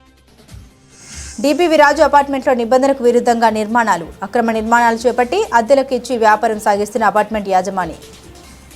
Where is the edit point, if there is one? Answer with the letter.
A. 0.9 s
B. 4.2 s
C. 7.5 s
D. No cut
D